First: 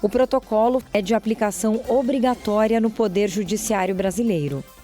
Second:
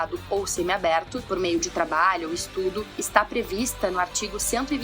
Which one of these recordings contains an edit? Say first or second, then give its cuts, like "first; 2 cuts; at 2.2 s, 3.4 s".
first; 1 cut; at 0.9 s